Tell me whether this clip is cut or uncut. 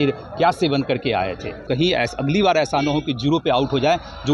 cut